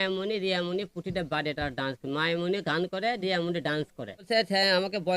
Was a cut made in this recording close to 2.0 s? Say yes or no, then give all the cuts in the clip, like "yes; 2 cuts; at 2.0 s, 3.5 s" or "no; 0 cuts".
no; 1 cut; at 4.1 s